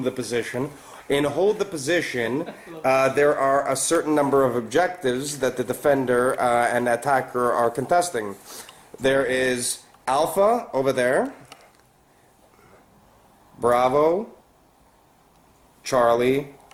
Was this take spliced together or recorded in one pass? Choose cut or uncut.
uncut